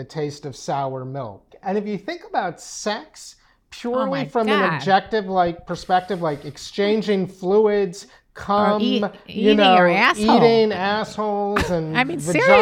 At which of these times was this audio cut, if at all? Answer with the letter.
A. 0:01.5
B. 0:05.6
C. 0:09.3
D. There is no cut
A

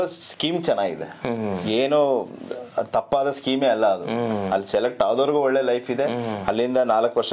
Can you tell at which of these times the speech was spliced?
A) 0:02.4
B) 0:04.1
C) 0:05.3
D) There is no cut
D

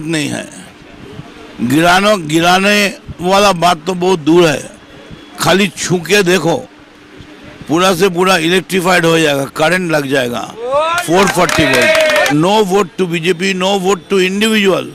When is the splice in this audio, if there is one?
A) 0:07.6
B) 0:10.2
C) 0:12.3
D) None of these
C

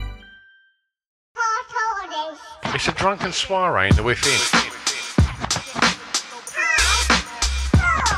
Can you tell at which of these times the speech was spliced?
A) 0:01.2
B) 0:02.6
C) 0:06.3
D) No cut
A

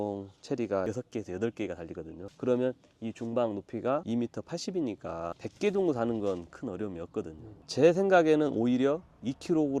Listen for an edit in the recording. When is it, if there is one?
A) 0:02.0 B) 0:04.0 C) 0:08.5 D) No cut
B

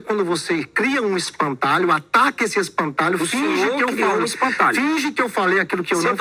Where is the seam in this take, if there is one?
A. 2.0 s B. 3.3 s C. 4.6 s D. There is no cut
D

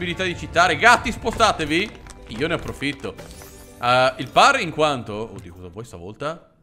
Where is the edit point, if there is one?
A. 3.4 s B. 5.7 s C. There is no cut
C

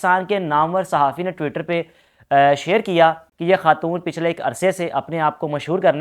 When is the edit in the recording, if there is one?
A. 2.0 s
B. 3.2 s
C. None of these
B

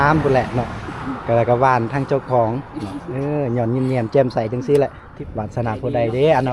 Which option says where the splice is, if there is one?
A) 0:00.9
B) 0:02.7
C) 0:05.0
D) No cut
C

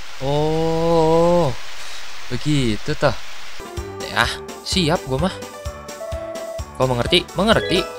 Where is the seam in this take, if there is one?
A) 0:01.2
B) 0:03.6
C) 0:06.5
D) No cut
B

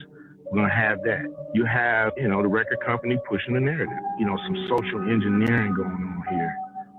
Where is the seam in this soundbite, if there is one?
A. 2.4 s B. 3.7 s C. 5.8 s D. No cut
A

